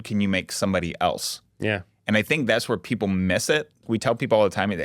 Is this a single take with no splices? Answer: no; 1 cut; at 3.8 s

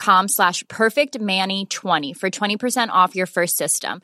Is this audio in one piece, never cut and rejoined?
yes; 0 cuts

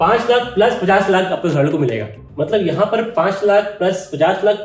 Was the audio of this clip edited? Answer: yes; 1 cut; at 2.2 s

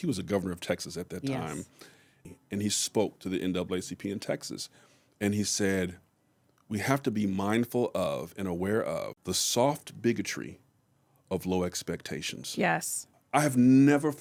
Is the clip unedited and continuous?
yes; 0 cuts

